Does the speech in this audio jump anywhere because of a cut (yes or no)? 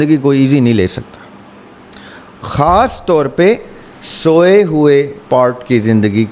no